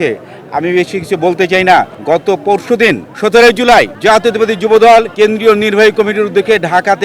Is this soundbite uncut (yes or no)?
no